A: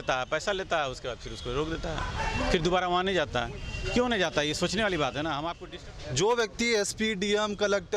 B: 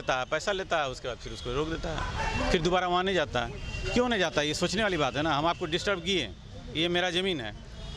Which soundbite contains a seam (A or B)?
A